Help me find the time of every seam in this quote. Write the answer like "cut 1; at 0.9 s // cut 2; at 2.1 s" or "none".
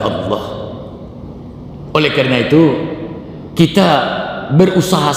cut 1; at 1.9 s